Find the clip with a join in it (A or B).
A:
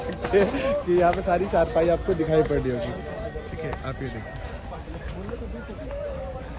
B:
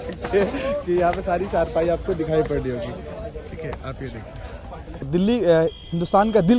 B